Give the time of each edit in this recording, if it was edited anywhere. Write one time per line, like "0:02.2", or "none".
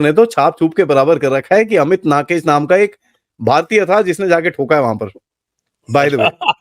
none